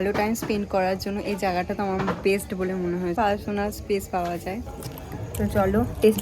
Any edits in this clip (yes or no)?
yes